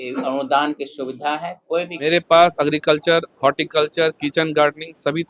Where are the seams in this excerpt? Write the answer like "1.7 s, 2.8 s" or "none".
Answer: 1.9 s